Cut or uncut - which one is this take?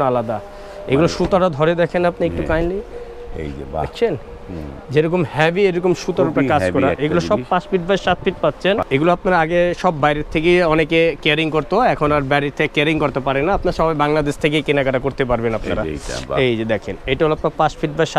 cut